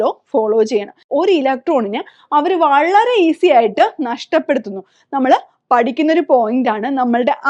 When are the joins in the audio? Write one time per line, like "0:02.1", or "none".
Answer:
0:01.1